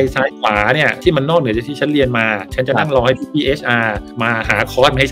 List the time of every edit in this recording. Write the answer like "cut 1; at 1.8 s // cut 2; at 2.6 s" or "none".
cut 1; at 0.9 s // cut 2; at 2.7 s